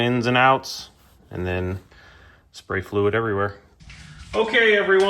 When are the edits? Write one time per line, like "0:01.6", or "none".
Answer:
0:03.7